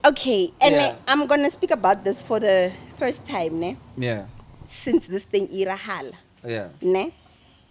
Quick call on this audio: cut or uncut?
uncut